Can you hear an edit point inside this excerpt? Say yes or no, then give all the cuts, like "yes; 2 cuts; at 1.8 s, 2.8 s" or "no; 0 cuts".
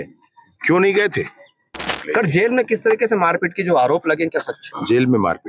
yes; 1 cut; at 2.0 s